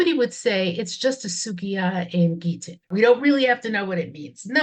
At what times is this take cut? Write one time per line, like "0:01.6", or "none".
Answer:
0:02.9